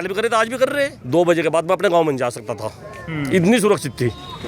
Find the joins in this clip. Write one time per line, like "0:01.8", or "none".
0:01.0